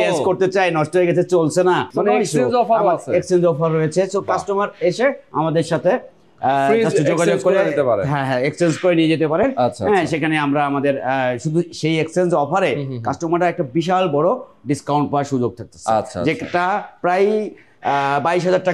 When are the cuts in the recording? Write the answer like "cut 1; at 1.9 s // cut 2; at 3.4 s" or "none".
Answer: none